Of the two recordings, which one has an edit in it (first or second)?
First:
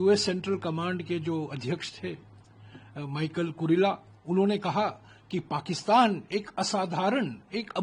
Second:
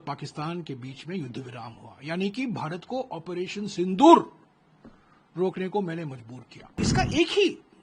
second